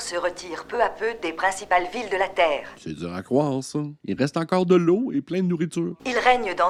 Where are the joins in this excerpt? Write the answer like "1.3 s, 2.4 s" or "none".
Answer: none